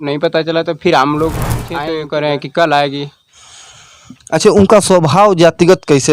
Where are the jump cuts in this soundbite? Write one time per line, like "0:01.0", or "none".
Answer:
0:01.8